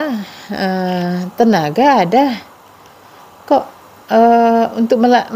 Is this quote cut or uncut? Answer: uncut